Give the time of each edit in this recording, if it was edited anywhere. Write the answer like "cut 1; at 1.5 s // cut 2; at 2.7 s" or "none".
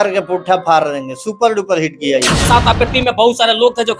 cut 1; at 2.5 s